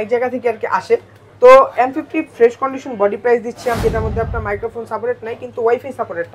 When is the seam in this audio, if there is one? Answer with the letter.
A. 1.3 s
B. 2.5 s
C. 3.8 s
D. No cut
C